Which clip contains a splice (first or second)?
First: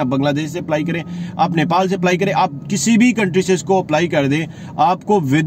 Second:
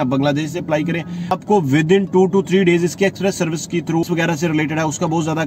second